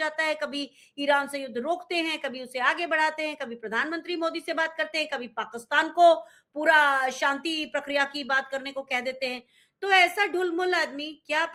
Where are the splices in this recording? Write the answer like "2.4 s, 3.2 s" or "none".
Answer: none